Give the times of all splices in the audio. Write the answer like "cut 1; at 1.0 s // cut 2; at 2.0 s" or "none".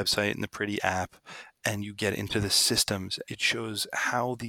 cut 1; at 3.2 s